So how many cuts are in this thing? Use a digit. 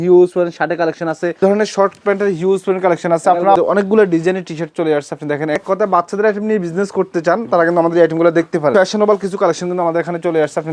4